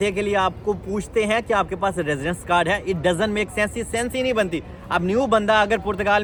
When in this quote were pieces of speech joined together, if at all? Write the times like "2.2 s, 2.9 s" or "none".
none